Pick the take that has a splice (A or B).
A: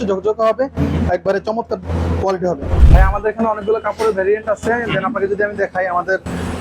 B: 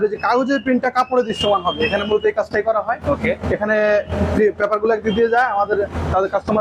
A